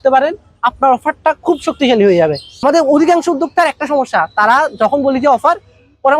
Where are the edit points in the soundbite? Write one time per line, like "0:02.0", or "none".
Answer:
0:02.5